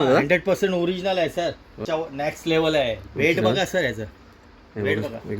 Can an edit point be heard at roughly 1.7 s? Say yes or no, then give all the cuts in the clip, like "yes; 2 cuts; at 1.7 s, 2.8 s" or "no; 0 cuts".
yes; 1 cut; at 1.7 s